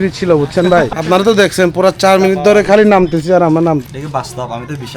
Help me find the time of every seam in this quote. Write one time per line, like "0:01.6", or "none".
0:00.9
0:03.8